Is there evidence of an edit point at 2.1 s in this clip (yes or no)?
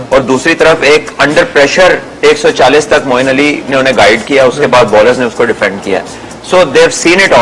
yes